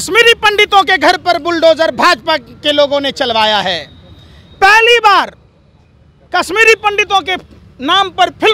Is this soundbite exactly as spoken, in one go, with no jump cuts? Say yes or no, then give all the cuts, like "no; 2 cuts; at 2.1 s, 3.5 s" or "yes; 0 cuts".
yes; 0 cuts